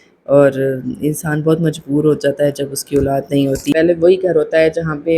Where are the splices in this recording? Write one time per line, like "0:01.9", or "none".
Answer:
0:03.7